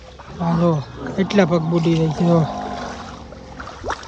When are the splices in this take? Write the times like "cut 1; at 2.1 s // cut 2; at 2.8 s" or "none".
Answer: none